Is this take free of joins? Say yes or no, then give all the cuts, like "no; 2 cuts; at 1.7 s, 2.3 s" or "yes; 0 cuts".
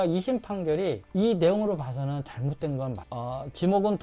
no; 1 cut; at 3.0 s